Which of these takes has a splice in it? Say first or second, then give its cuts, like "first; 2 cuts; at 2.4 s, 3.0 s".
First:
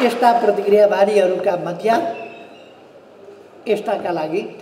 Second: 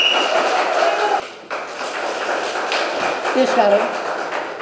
second; 1 cut; at 1.2 s